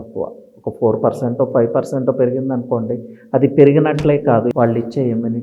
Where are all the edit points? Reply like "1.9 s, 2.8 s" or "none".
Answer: 4.5 s

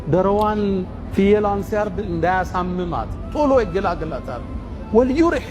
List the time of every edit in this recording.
none

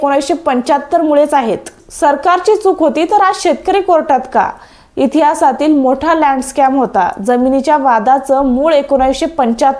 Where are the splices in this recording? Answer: 1.8 s

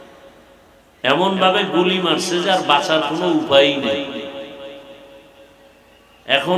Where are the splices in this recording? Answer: none

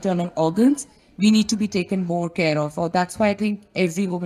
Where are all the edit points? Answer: none

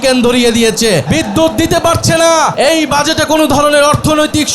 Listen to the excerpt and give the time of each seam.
1.0 s, 2.5 s

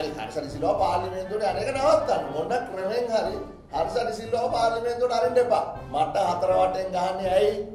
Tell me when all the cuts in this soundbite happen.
5.8 s

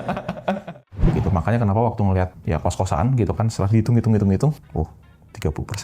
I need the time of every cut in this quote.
1.1 s, 2.4 s, 4.6 s

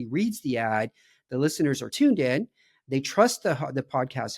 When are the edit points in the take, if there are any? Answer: 1.9 s

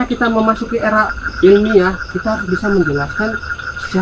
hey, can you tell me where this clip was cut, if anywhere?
1.2 s

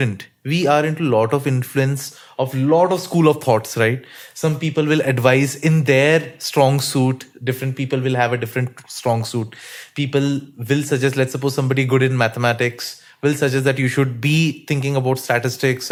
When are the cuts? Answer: none

